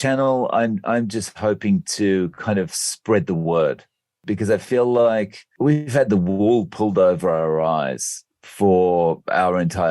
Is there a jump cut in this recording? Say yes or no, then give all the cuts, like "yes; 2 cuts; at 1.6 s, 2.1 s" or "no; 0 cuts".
no; 0 cuts